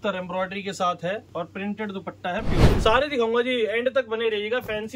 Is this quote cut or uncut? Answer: cut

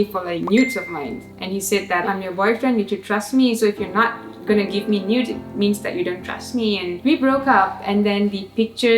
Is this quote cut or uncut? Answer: cut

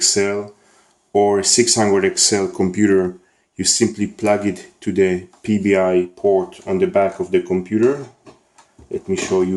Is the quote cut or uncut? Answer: cut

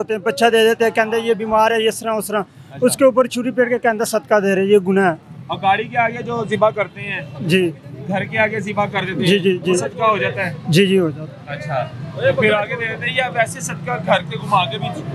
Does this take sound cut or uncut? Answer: uncut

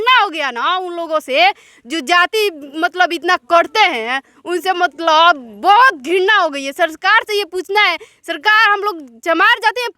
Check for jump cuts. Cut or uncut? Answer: uncut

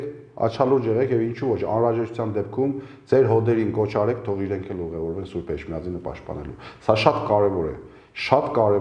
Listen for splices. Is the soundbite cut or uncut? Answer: uncut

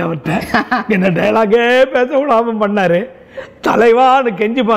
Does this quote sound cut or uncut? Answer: uncut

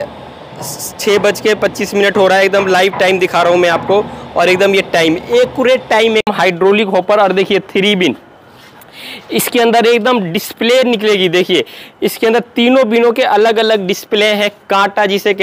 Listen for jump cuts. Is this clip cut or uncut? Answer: cut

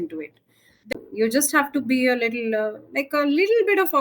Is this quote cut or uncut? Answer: cut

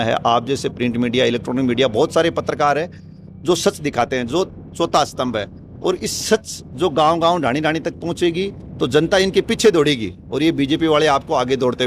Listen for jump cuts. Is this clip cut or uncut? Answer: uncut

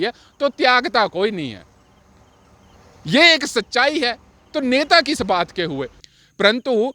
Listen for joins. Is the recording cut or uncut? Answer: cut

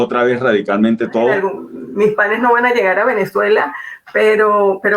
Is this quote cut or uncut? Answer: cut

